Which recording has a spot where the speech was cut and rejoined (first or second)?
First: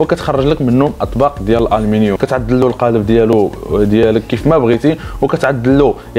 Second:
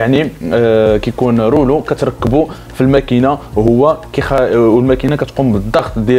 first